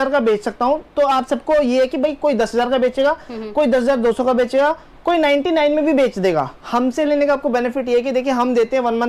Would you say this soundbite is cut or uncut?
cut